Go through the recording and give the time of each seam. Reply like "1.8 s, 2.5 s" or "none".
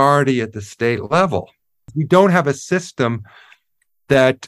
1.9 s